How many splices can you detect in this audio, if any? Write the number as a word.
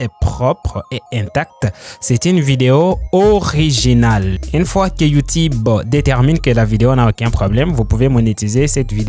one